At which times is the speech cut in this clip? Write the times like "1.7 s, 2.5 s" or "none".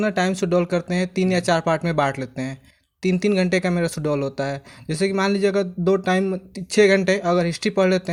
none